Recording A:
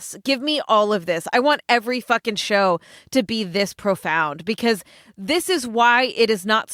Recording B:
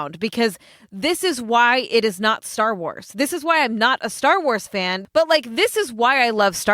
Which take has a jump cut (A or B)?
B